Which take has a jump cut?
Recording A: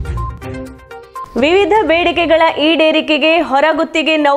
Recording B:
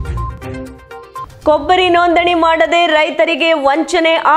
B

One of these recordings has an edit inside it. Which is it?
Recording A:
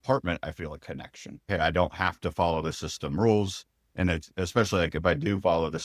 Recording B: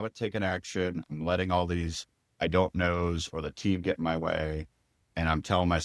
A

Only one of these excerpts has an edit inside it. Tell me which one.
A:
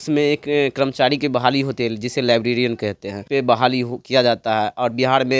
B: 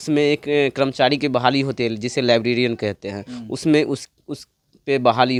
A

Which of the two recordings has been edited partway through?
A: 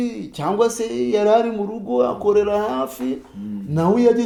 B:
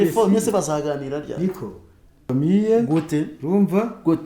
B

